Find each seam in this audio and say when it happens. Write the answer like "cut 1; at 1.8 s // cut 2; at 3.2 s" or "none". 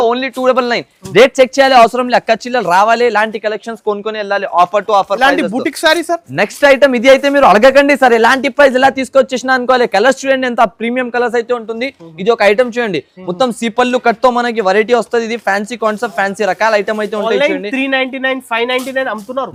none